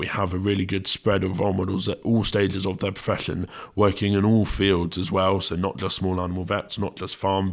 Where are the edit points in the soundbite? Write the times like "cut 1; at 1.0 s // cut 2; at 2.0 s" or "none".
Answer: none